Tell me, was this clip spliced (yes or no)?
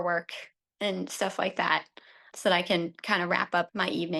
no